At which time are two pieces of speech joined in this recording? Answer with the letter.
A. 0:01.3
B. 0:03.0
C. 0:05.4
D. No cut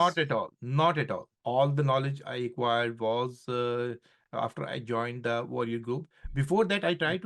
A